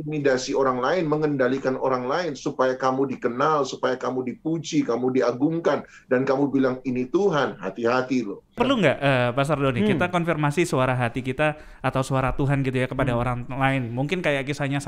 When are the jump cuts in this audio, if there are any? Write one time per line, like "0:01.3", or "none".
0:08.6